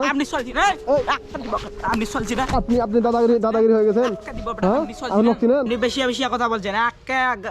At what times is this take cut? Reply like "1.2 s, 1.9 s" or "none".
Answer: 5.7 s